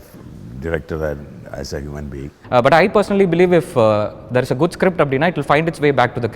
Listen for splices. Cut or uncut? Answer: cut